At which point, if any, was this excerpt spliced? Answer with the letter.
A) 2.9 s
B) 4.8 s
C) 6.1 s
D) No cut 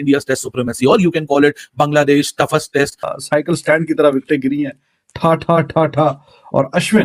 D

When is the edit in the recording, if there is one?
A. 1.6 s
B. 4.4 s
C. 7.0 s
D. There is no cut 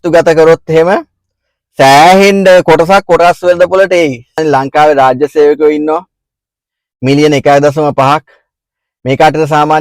B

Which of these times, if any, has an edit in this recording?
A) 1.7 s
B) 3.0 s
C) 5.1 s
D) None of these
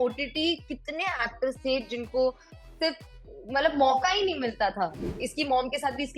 C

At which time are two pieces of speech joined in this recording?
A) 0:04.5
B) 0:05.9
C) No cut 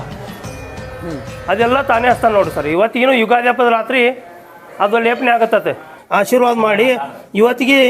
B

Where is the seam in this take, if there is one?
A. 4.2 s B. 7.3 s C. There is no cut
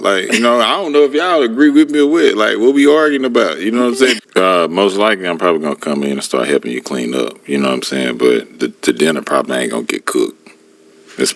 A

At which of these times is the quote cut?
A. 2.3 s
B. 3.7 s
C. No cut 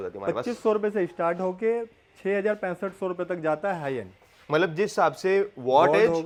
C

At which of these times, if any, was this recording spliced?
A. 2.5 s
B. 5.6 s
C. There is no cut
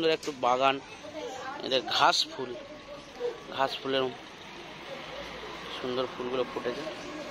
C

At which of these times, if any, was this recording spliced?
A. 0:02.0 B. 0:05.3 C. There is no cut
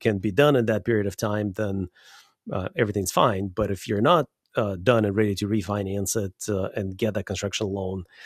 C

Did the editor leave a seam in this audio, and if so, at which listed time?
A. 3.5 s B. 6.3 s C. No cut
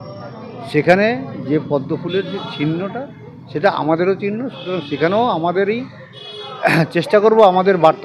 C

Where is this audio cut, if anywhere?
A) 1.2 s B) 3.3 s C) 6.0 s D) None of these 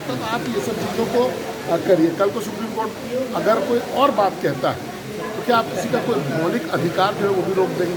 D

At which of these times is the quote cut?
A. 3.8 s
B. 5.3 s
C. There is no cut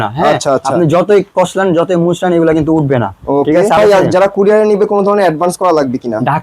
A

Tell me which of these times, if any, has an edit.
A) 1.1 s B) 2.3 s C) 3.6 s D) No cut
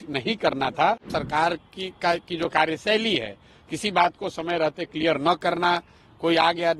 A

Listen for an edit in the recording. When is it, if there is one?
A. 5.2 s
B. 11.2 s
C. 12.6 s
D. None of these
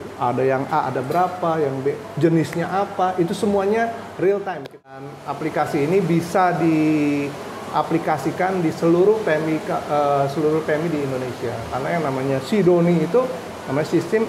A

